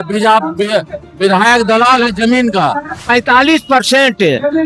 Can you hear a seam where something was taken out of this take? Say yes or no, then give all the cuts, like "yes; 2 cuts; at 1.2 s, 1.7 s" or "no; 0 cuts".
yes; 1 cut; at 3.0 s